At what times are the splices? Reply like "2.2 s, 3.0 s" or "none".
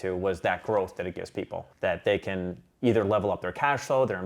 1.6 s